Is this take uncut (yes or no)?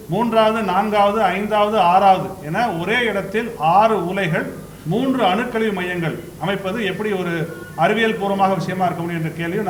yes